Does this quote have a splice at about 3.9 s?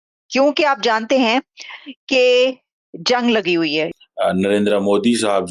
yes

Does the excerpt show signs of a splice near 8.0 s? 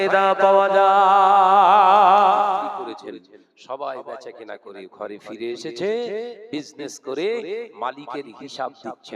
no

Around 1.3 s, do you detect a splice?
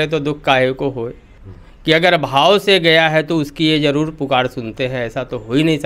yes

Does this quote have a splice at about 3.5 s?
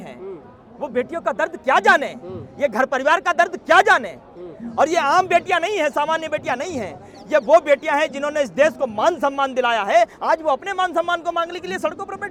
no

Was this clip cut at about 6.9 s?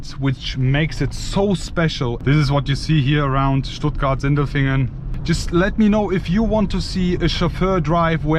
no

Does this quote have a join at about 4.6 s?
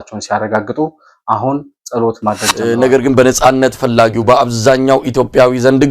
no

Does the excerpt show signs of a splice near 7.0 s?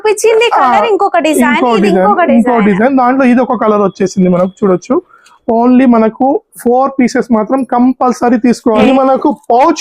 no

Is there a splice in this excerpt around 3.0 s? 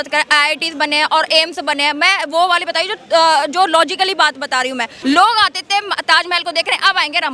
no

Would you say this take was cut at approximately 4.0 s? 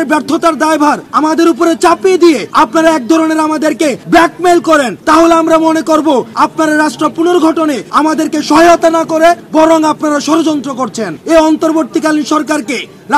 yes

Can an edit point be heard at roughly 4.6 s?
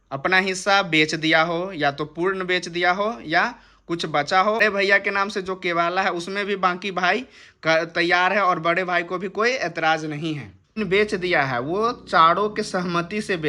yes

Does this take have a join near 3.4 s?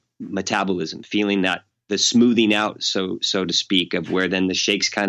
no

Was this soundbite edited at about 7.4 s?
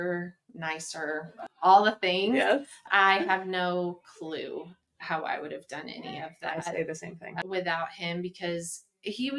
yes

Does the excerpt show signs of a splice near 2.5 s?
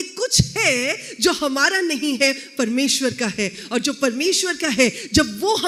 no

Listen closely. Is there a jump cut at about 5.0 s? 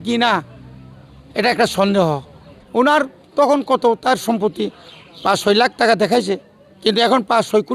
no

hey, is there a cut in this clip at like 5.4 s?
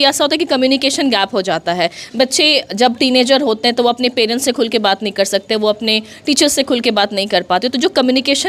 no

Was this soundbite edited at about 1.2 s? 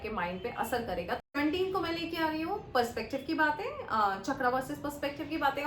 yes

